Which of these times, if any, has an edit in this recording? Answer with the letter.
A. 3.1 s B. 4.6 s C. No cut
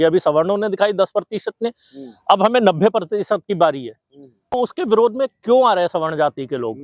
B